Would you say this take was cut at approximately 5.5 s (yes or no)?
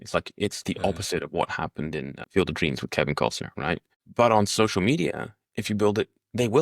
no